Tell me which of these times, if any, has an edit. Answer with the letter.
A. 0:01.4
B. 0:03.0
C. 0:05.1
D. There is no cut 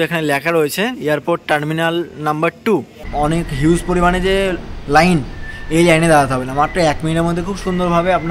B